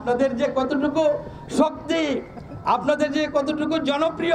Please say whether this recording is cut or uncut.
uncut